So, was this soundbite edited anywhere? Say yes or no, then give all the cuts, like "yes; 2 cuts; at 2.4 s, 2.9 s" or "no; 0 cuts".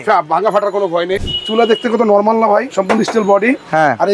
yes; 2 cuts; at 1.2 s, 2.7 s